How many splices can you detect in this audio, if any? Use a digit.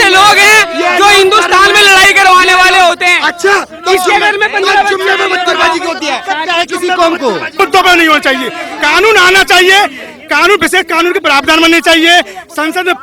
1